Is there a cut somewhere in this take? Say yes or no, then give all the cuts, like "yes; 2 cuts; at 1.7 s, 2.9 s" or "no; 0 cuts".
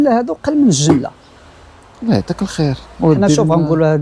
no; 0 cuts